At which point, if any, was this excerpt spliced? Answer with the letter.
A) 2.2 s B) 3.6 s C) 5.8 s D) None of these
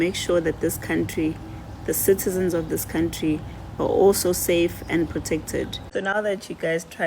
C